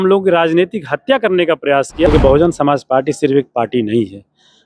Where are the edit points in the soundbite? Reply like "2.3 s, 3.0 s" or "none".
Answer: 2.1 s